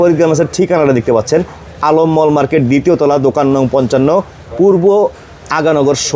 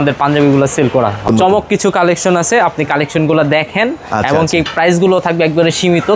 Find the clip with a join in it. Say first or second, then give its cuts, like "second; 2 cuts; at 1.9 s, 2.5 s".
second; 1 cut; at 1.3 s